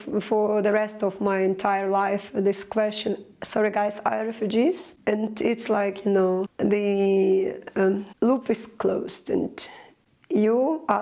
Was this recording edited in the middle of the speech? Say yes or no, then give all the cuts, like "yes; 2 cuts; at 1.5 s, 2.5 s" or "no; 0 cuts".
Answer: yes; 3 cuts; at 4.9 s, 6.5 s, 8.1 s